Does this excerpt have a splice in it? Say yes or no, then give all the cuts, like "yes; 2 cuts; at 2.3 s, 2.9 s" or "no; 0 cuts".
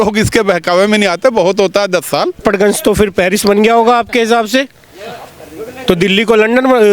yes; 1 cut; at 2.4 s